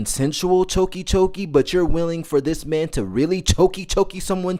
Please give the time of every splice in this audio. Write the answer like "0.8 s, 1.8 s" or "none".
none